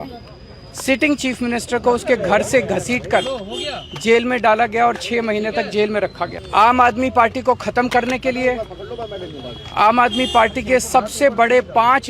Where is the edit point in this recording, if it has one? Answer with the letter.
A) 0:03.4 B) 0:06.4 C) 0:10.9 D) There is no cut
B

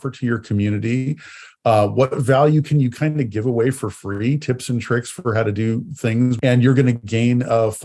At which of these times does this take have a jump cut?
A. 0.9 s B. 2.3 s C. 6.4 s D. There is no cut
C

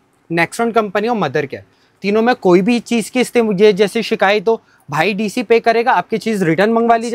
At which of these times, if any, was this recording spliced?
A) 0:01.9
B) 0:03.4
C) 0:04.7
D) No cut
D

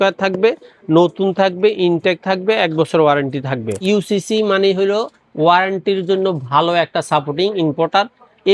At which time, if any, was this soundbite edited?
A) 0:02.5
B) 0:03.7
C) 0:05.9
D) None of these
B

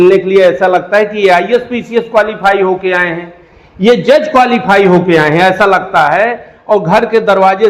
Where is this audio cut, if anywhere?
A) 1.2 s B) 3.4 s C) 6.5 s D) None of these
D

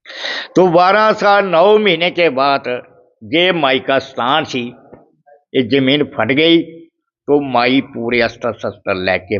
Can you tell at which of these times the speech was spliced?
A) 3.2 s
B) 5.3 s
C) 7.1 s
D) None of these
D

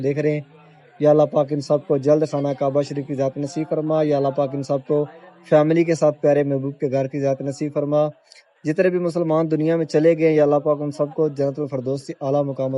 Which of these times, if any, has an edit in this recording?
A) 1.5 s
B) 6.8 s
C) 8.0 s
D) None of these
D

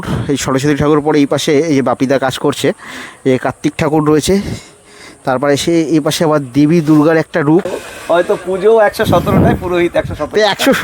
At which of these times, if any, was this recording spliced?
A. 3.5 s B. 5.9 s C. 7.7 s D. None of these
C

